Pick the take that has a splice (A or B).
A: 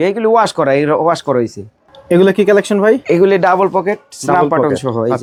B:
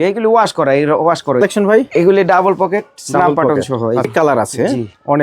B